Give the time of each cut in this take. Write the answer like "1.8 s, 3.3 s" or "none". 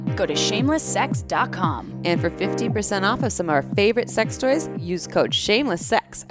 none